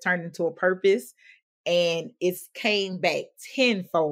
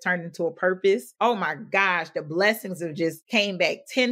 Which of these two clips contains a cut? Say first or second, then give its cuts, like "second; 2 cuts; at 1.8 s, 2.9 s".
second; 1 cut; at 1.1 s